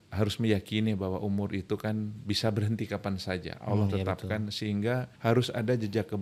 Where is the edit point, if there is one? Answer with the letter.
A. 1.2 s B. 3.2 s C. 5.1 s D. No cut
C